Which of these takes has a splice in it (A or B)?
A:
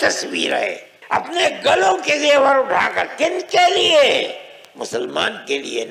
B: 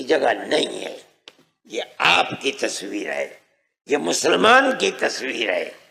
A